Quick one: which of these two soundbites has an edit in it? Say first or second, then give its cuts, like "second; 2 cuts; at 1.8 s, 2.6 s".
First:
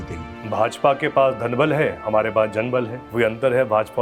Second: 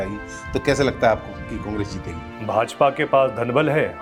first; 1 cut; at 3.0 s